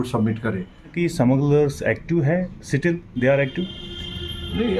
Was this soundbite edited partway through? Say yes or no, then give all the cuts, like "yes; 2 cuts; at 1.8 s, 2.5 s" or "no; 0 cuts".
yes; 1 cut; at 0.9 s